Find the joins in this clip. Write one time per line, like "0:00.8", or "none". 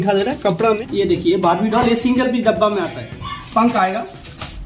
0:00.8
0:03.3